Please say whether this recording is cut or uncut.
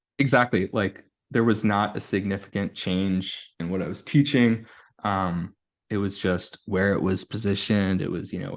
uncut